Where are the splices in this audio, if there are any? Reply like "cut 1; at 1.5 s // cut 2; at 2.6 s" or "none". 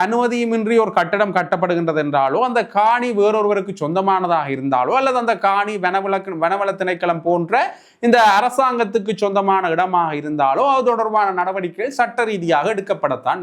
none